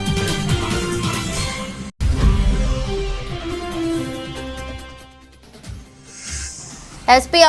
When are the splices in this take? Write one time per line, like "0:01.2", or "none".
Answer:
0:01.9